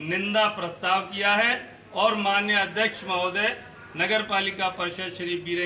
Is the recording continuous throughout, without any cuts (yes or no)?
yes